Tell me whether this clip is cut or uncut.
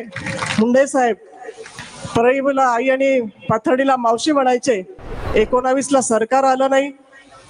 cut